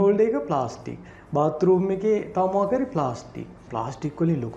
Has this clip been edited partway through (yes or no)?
yes